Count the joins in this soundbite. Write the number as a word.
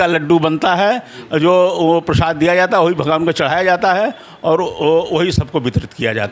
zero